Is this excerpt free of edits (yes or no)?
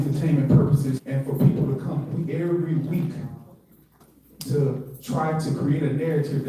no